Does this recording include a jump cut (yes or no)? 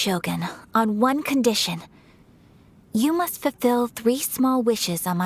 no